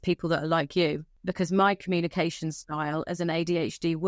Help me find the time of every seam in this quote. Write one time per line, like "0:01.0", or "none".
0:01.1